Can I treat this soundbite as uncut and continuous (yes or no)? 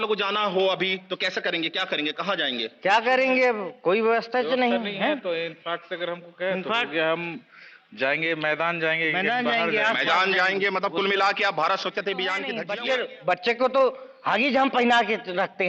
no